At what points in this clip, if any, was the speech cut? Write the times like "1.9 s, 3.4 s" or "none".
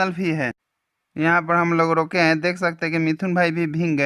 none

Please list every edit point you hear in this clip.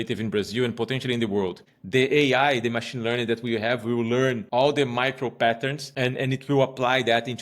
1.7 s, 4.4 s, 5.8 s

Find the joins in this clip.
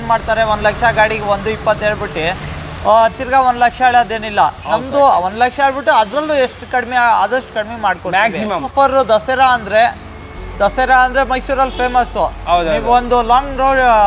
8.7 s

